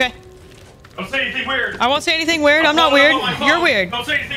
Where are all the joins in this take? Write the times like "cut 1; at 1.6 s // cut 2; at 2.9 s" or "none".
none